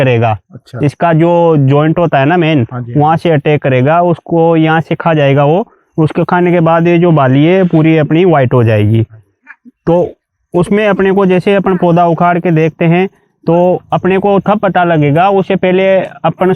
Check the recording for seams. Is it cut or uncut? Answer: uncut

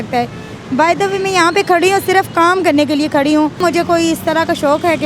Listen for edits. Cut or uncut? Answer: cut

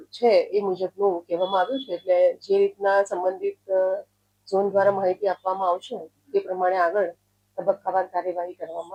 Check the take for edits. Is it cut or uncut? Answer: uncut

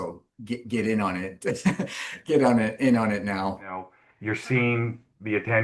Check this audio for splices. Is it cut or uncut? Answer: cut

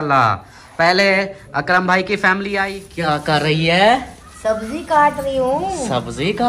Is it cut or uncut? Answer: cut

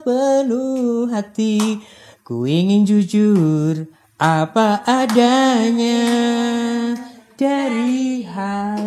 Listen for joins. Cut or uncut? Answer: uncut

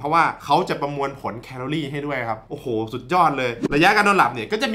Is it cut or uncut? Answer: cut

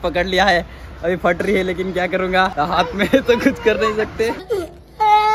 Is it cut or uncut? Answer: cut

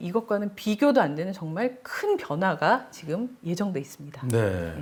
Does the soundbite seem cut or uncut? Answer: uncut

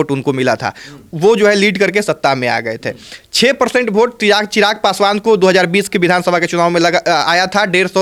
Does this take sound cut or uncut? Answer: uncut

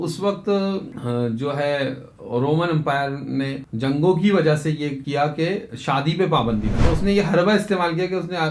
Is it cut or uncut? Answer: cut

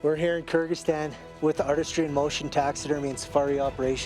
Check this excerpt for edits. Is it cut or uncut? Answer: cut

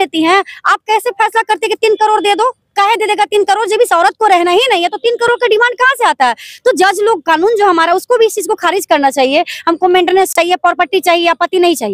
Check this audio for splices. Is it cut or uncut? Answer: uncut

